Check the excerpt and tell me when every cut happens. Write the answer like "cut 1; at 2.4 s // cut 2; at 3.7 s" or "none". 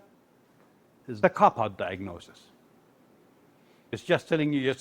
cut 1; at 1.0 s // cut 2; at 3.9 s